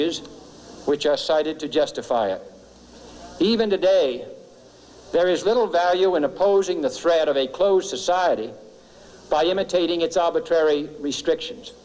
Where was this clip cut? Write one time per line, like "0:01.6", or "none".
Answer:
none